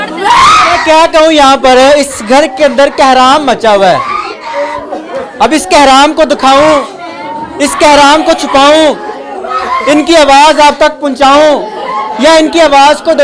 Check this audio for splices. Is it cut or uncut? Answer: uncut